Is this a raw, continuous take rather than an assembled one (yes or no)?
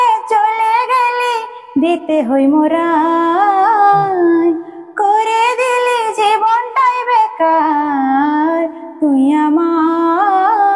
yes